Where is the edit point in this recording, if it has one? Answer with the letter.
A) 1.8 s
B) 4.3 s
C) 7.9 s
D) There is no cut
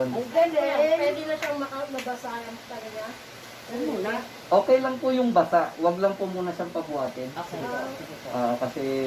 D